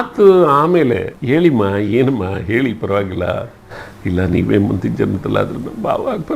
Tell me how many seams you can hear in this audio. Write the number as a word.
one